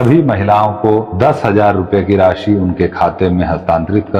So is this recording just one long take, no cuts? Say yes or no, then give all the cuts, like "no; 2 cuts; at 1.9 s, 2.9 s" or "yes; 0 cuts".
no; 1 cut; at 1.1 s